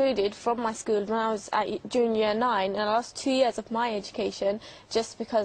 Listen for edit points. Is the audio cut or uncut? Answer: cut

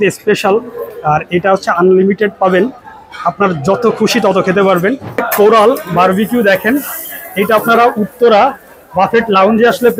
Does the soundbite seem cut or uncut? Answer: cut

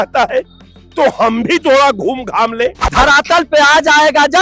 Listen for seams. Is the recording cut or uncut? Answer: cut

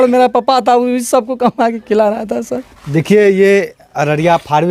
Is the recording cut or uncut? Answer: uncut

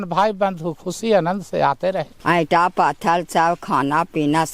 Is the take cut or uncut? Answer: cut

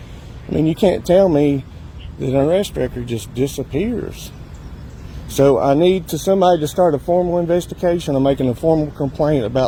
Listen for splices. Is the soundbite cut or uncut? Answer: uncut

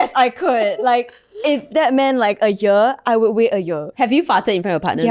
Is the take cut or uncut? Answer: cut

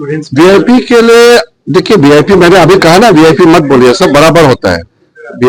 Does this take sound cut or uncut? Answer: uncut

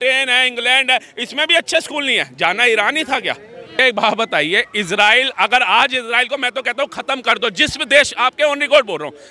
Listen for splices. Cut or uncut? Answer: cut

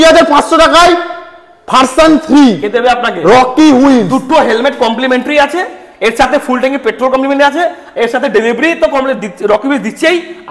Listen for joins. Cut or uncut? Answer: uncut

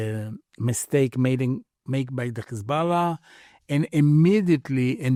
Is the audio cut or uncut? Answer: uncut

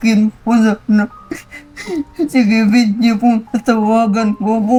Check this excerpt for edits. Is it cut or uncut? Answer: uncut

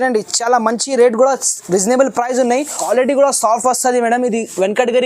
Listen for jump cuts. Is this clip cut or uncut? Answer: cut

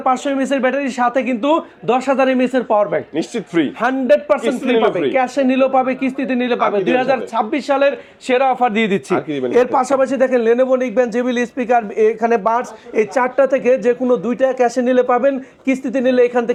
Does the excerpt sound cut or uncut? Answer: uncut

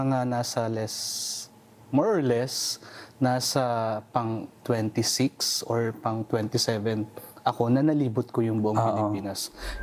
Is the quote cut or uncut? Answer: uncut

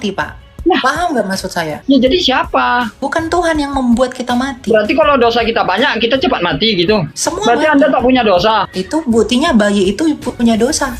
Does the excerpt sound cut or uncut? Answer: cut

